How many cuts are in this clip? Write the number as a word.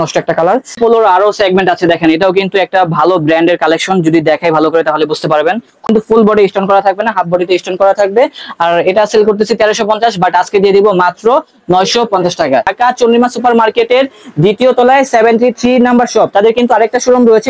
three